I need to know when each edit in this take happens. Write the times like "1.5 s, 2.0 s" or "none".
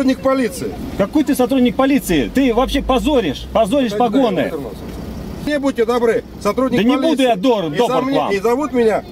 5.5 s